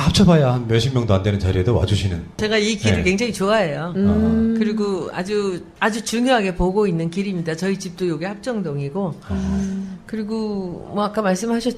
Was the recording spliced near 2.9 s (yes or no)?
yes